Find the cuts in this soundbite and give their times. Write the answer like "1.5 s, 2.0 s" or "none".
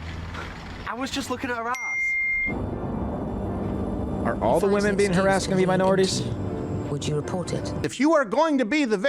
7.8 s